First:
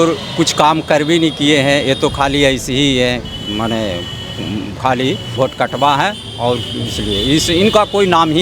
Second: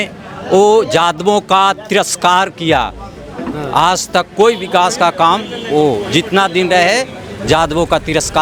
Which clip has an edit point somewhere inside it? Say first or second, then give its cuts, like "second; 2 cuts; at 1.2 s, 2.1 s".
first; 1 cut; at 5.3 s